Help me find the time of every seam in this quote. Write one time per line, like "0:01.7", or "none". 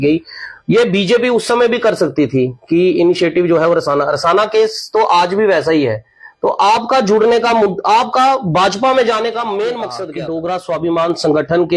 0:10.0